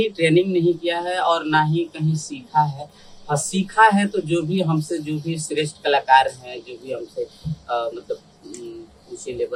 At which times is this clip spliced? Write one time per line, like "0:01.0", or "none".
none